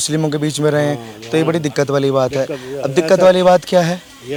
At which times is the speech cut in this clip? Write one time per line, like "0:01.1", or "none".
none